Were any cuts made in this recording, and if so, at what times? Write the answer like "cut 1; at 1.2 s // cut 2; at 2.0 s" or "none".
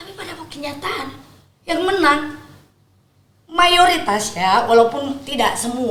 none